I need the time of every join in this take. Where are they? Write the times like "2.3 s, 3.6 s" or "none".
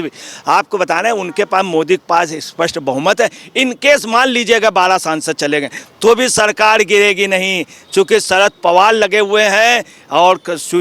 none